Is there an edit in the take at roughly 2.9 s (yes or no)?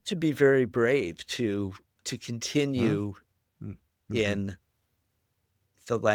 no